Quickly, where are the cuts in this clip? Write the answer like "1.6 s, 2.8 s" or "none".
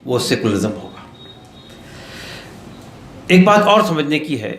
none